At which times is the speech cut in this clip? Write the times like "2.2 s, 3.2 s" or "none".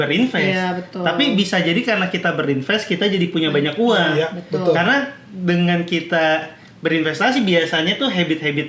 none